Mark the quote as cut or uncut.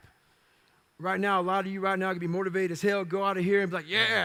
uncut